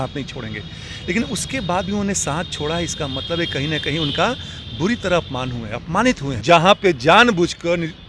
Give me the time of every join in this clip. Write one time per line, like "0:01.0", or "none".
0:06.3